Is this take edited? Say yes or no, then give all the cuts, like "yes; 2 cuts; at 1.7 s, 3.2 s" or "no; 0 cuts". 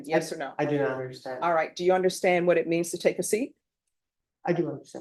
no; 0 cuts